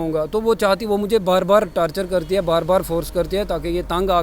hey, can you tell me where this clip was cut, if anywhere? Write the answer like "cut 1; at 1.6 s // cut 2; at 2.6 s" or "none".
none